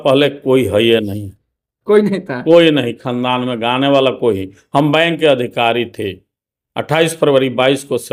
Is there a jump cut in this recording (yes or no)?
no